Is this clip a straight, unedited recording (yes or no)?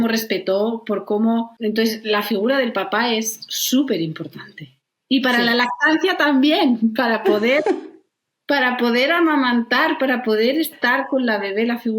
no